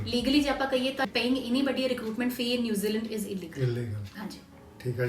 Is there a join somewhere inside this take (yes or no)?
yes